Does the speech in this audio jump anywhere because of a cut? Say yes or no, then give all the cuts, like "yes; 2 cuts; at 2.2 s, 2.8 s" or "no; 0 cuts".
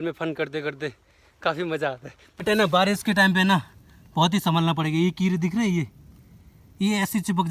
yes; 1 cut; at 2.2 s